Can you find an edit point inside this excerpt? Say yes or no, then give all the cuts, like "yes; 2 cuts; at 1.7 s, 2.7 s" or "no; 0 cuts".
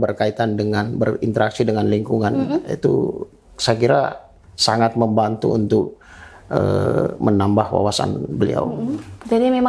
no; 0 cuts